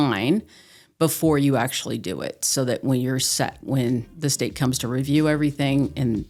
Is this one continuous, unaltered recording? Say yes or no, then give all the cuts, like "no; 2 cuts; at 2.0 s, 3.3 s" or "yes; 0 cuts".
yes; 0 cuts